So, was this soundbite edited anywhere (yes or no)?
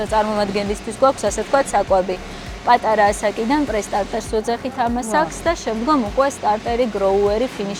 no